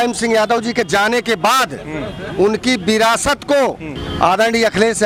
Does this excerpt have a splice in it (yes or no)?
no